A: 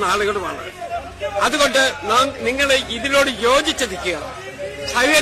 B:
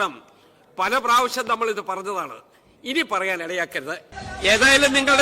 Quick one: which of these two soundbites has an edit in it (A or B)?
B